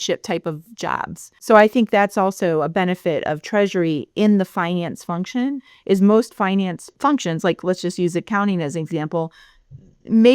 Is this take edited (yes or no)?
yes